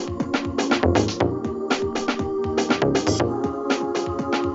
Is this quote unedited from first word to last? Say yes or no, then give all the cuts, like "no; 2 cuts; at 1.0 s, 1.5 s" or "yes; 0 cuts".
yes; 0 cuts